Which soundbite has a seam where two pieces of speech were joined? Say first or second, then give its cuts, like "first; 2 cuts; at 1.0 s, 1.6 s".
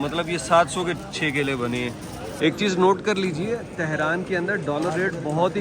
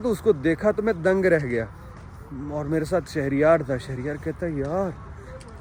first; 1 cut; at 2.4 s